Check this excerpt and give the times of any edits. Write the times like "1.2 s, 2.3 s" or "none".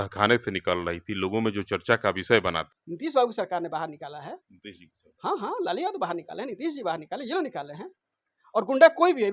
2.6 s